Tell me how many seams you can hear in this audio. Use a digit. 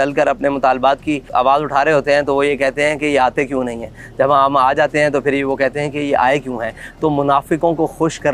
0